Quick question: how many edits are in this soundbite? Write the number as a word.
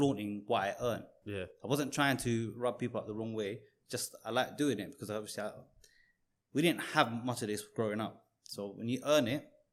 zero